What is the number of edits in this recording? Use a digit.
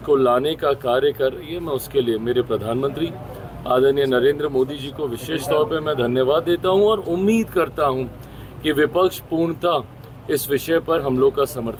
0